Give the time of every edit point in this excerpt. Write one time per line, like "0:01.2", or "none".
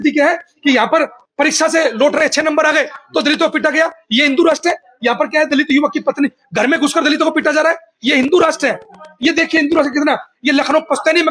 none